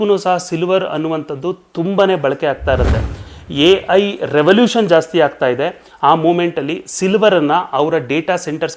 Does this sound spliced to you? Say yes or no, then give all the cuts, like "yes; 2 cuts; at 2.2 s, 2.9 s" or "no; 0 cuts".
yes; 1 cut; at 3.2 s